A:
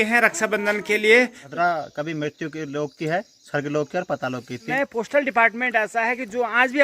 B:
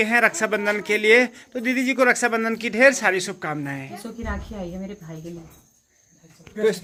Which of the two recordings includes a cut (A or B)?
A